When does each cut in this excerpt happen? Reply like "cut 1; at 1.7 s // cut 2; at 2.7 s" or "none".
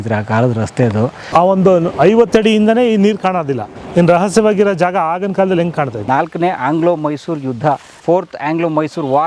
cut 1; at 1.2 s // cut 2; at 3.7 s // cut 3; at 6.0 s